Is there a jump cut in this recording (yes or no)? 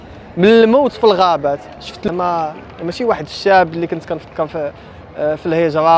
yes